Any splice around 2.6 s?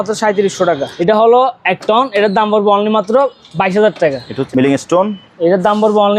no; 2 cuts; at 0.9 s, 4.3 s

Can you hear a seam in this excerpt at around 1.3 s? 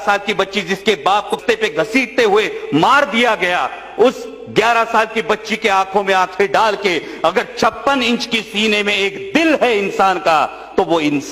yes; 1 cut; at 1.3 s

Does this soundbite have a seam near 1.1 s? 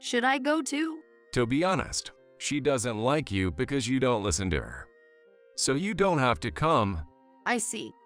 yes; 2 cuts; at 1.1 s, 7.2 s

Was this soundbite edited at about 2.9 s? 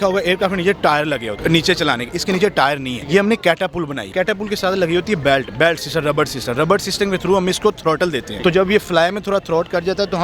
yes; 4 cuts; at 1.3 s, 2.9 s, 4.1 s, 8.3 s

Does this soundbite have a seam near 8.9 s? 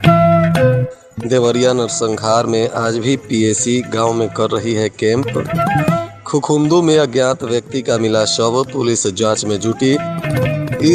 no; 1 cut; at 0.9 s

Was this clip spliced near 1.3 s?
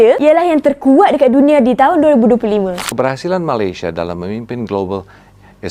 no; 1 cut; at 2.8 s

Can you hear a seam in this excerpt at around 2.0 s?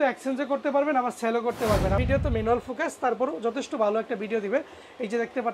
yes; 1 cut; at 2.0 s

